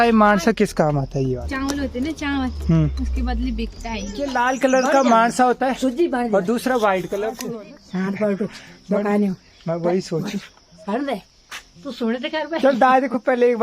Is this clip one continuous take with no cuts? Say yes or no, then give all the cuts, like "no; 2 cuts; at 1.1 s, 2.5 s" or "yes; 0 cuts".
no; 3 cuts; at 1.4 s, 4.3 s, 7.4 s